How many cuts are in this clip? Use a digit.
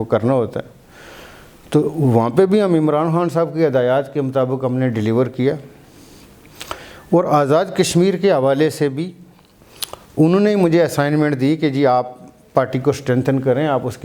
0